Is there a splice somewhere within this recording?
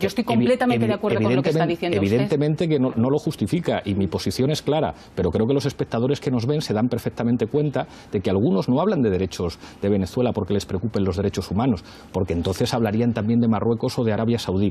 yes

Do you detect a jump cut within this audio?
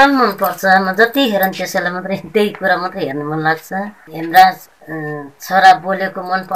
yes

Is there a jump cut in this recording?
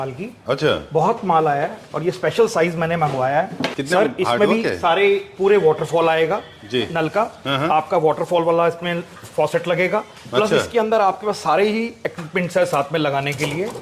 yes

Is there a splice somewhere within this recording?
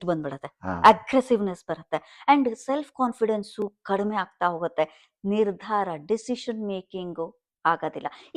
no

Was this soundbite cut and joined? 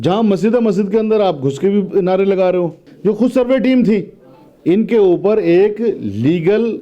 yes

